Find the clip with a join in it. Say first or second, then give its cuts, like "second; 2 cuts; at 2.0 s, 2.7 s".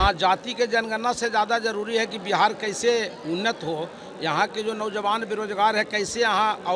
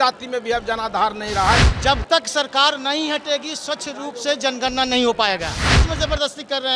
second; 2 cuts; at 1.7 s, 5.8 s